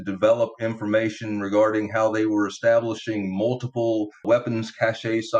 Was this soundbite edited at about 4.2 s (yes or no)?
yes